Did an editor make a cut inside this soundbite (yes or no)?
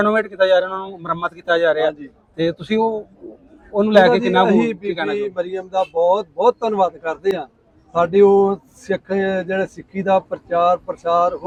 no